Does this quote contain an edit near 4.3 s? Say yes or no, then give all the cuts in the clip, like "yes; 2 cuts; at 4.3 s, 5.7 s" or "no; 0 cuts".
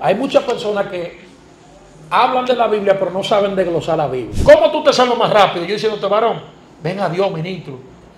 yes; 1 cut; at 4.3 s